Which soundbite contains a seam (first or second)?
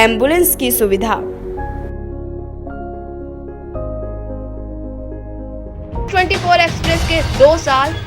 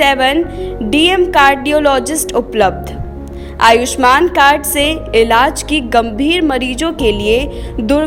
first